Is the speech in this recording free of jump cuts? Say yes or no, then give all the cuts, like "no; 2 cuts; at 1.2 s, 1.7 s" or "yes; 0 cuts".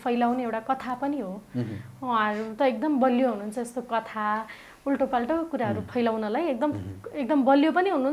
yes; 0 cuts